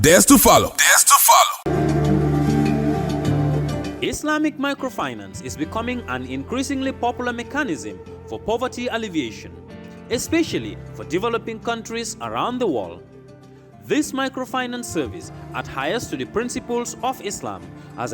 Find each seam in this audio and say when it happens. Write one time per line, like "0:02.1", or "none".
0:01.6